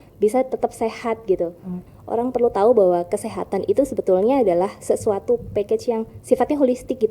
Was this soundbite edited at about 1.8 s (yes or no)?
yes